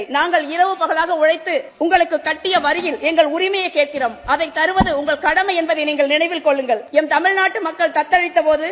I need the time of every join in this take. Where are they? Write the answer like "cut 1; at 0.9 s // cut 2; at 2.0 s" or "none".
cut 1; at 1.7 s // cut 2; at 6.9 s